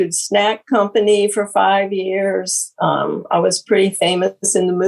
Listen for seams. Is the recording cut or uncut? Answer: uncut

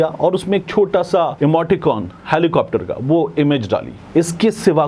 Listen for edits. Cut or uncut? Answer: cut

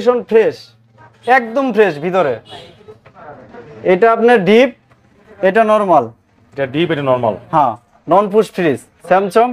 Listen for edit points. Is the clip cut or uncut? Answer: uncut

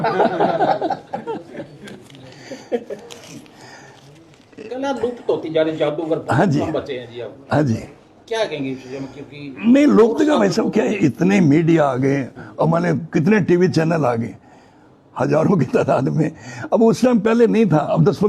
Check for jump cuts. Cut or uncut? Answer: uncut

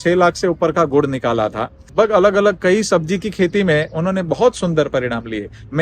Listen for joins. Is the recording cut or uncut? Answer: cut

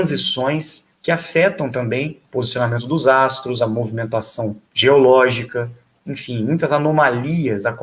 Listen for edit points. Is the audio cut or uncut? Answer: uncut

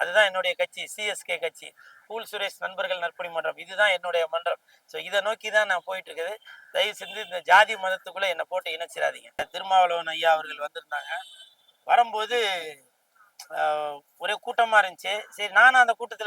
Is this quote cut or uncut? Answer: cut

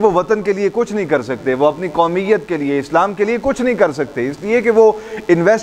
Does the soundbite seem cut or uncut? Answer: uncut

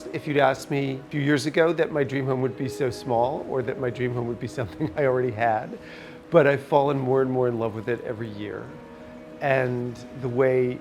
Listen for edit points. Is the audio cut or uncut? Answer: cut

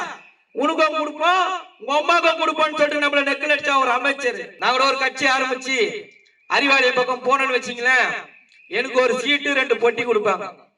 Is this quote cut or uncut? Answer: cut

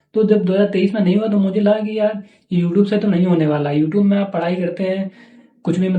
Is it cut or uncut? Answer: uncut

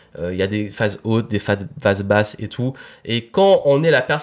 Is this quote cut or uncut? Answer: uncut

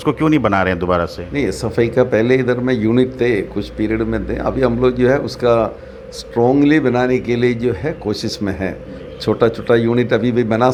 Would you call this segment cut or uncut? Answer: uncut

